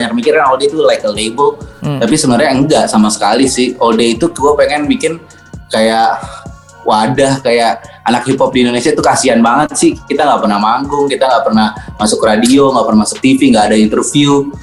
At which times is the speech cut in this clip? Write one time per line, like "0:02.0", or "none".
none